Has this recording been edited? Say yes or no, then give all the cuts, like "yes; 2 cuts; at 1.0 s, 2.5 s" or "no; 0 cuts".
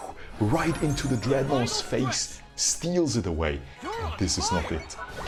no; 0 cuts